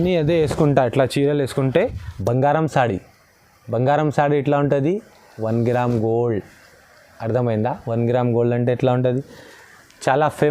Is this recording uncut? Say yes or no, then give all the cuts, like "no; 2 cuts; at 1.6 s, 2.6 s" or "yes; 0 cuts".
no; 1 cut; at 2.0 s